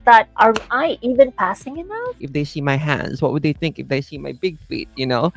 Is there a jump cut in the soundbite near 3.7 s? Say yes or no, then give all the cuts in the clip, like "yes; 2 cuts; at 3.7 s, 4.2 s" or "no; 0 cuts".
no; 1 cut; at 2.1 s